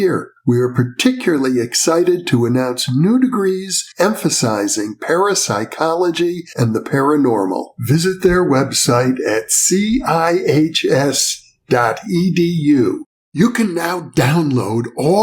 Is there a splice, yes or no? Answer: no